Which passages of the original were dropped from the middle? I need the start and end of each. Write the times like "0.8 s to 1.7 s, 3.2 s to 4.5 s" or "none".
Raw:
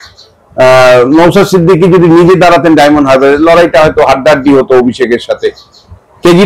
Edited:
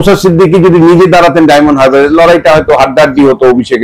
none